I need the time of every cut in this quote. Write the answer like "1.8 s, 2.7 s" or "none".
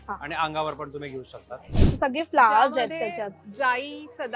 1.8 s